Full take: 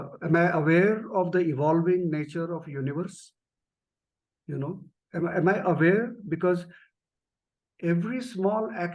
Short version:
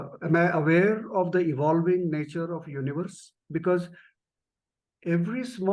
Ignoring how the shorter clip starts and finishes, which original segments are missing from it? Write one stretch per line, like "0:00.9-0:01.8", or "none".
0:03.4-0:06.2